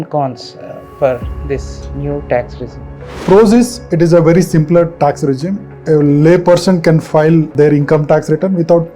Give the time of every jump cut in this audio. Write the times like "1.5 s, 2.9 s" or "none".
3.2 s, 5.7 s, 7.5 s